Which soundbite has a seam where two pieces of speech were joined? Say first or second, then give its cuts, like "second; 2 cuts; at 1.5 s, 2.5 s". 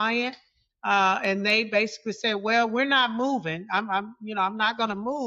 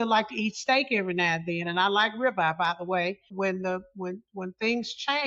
second; 1 cut; at 3.3 s